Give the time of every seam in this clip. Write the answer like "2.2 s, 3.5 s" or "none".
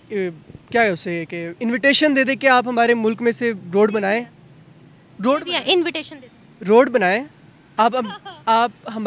none